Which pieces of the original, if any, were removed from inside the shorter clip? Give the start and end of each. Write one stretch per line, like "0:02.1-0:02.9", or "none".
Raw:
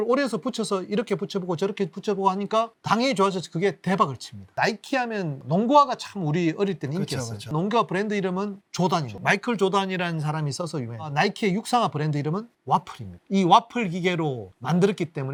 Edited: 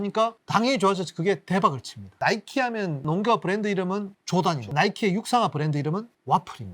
0:05.3-0:07.4
0:09.1-0:11.0